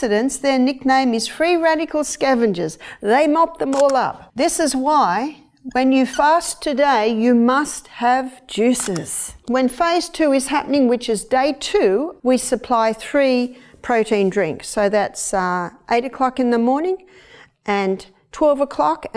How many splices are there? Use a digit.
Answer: 3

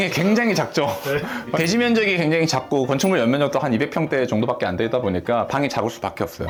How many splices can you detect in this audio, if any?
0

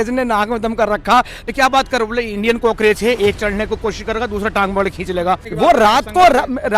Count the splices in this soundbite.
2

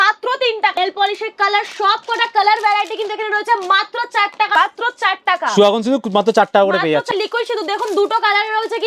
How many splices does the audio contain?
3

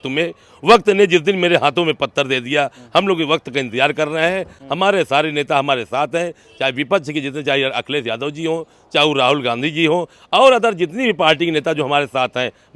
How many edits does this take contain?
0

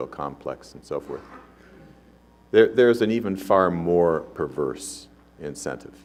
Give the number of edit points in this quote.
0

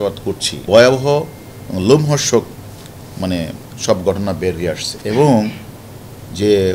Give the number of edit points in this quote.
0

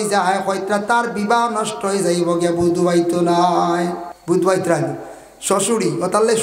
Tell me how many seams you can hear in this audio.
1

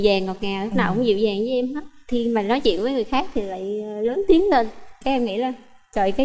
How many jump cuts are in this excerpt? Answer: 0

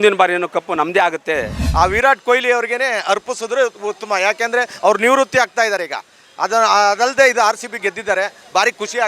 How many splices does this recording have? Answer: 1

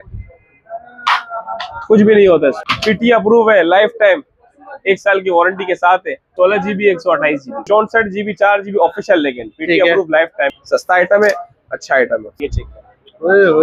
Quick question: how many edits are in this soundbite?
5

